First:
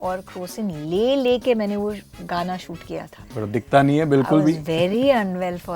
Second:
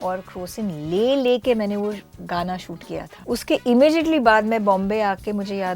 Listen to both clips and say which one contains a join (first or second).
second